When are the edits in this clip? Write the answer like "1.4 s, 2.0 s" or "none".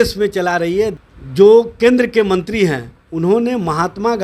0.9 s